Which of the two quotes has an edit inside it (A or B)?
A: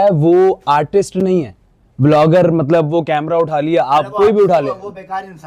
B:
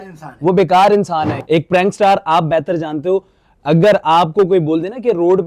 B